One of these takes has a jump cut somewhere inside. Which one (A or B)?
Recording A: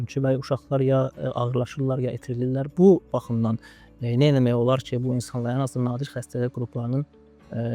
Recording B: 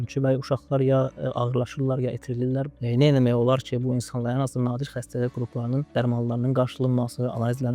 B